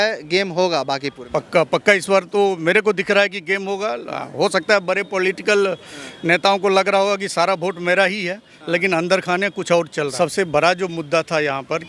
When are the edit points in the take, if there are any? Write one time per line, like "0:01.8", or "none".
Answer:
0:01.2
0:10.1